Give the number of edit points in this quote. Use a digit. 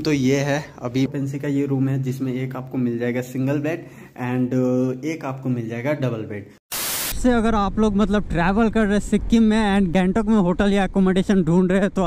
3